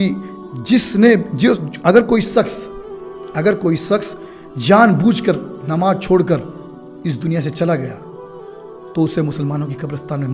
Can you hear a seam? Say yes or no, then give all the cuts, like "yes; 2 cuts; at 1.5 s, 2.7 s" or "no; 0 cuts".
no; 0 cuts